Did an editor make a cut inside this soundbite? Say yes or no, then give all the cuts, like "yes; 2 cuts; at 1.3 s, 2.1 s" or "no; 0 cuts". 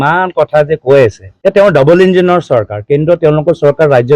yes; 1 cut; at 1.3 s